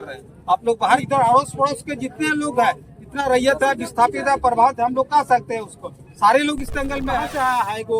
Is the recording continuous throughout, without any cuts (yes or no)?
no